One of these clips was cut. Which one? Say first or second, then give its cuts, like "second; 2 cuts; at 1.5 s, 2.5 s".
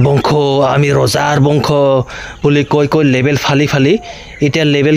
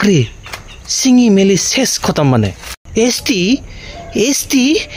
second; 1 cut; at 2.7 s